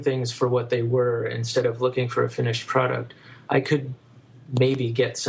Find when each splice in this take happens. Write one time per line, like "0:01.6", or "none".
none